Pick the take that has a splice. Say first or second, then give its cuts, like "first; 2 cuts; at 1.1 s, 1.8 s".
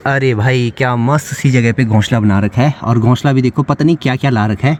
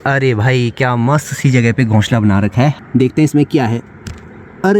second; 1 cut; at 2.8 s